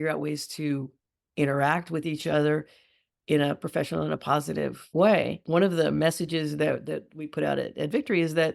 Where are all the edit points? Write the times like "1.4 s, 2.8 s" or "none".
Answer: 4.8 s, 5.4 s